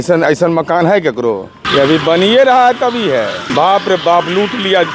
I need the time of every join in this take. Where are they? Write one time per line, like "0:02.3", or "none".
0:01.6
0:03.4

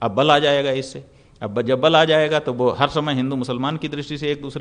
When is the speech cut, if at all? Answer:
none

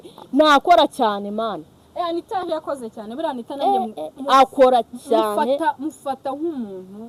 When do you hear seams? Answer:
none

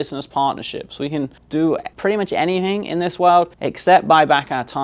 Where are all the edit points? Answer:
0:01.7
0:03.6

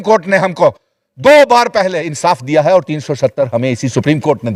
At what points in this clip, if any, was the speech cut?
none

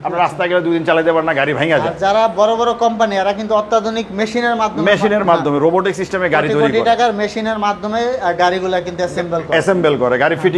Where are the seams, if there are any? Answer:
none

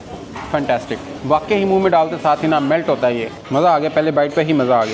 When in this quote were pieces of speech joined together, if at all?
0:03.4

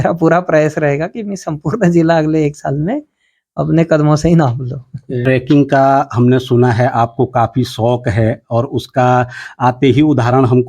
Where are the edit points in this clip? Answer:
0:05.1

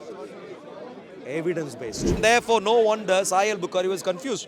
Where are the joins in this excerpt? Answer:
0:02.2

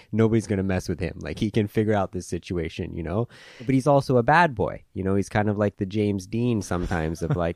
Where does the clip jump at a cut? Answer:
0:03.7

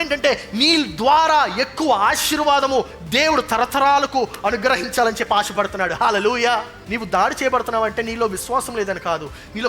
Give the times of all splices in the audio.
0:06.8

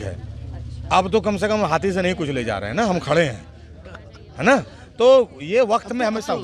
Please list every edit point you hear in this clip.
none

